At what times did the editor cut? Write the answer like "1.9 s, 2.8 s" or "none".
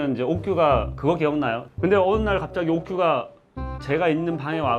1.6 s

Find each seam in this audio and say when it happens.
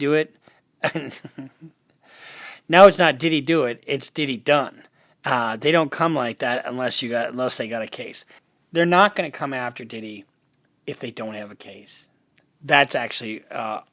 none

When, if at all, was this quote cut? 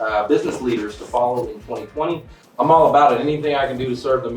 2.4 s

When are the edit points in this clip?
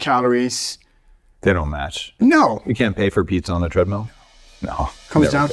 none

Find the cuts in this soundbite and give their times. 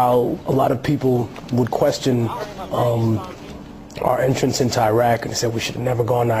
1.4 s

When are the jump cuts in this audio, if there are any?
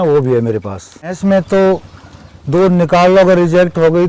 1.1 s

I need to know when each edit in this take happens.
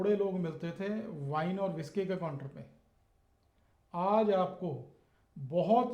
none

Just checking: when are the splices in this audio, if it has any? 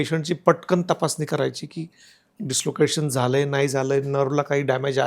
none

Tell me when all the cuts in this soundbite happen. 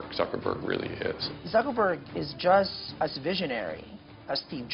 1.3 s, 2.8 s

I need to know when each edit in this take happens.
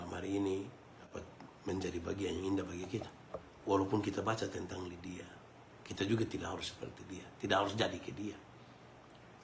1.1 s, 3.5 s

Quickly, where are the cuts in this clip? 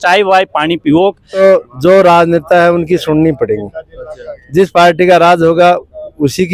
1.4 s

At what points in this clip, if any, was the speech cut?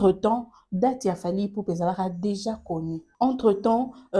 3.0 s

